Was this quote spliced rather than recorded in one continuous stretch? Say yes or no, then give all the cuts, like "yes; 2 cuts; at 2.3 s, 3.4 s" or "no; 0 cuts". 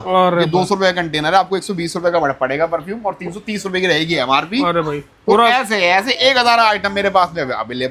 no; 0 cuts